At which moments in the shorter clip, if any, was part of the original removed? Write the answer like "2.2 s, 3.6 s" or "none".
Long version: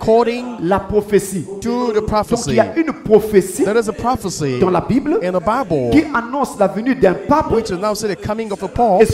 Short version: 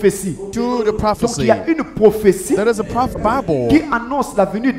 3.2 s